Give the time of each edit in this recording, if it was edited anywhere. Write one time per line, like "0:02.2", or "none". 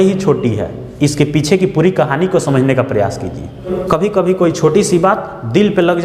0:03.6